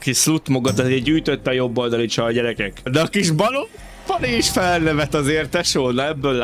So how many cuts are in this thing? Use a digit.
1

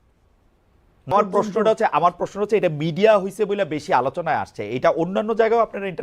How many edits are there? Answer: 1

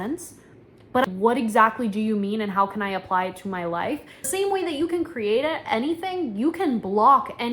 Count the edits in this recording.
2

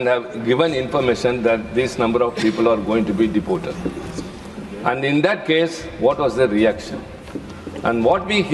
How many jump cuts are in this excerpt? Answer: 0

